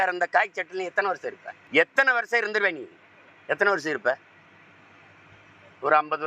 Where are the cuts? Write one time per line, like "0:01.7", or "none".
0:01.5